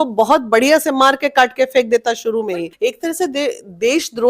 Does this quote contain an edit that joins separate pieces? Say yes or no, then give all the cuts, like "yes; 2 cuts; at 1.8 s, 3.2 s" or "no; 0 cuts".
yes; 1 cut; at 2.7 s